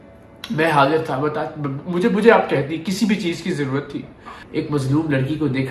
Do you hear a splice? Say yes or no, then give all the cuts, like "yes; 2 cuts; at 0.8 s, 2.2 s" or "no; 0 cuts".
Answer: yes; 1 cut; at 4.3 s